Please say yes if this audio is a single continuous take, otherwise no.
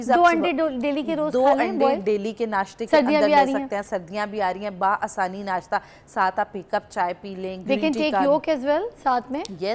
yes